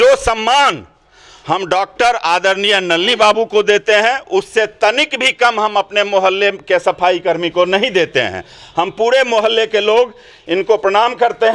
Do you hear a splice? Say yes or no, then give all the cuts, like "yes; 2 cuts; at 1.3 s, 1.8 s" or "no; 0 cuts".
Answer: no; 0 cuts